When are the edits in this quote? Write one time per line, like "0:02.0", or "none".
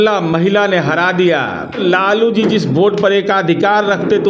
0:01.8